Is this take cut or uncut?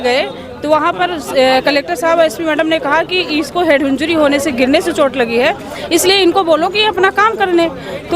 uncut